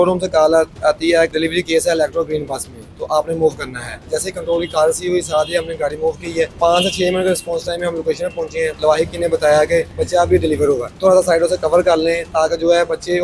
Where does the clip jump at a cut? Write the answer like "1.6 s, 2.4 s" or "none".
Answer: 1.3 s, 4.0 s, 6.6 s, 8.7 s, 10.0 s, 11.0 s